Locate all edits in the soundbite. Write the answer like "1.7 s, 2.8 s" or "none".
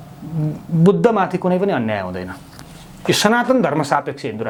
none